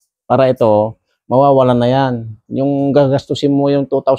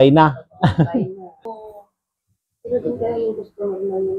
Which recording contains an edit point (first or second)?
second